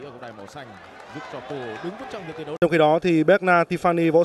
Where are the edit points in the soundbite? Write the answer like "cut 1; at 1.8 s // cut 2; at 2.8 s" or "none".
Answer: cut 1; at 2.4 s